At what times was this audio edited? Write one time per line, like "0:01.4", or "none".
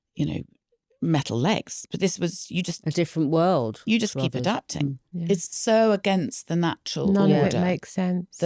0:05.1